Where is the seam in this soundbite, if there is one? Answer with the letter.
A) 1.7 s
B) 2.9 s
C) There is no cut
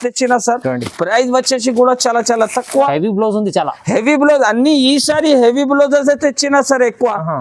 B